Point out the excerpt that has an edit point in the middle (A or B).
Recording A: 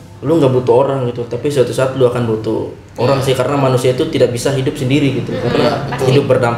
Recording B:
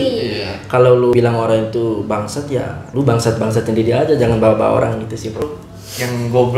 B